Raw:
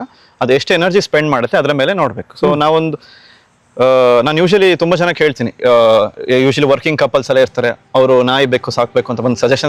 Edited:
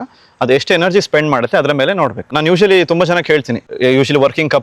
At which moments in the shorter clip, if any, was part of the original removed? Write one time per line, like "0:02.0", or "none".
0:02.4
0:03.6